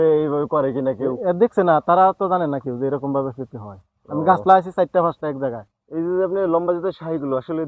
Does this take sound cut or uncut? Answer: uncut